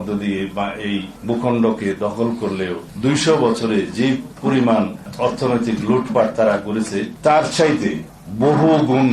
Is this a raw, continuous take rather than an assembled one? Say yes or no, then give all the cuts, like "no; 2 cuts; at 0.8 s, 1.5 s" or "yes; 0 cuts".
no; 5 cuts; at 1.1 s, 2.8 s, 4.3 s, 5.1 s, 7.1 s